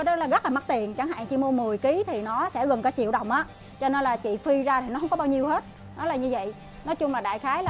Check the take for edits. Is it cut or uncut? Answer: uncut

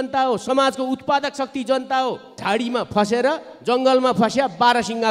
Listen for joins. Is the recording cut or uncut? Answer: cut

